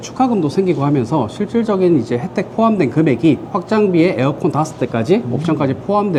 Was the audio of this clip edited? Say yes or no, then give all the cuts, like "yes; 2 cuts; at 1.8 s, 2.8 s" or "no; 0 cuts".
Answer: no; 0 cuts